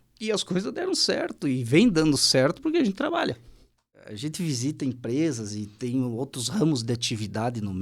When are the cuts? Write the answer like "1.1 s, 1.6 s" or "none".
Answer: 4.1 s